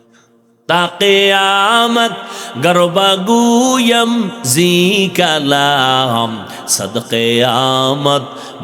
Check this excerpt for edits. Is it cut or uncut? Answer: uncut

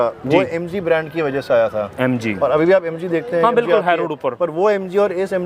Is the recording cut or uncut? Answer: uncut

